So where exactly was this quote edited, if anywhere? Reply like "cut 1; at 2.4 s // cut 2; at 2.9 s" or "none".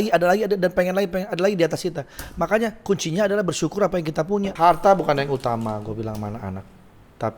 cut 1; at 4.5 s